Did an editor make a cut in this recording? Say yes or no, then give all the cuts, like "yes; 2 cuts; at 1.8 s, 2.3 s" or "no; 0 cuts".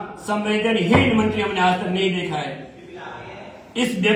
no; 0 cuts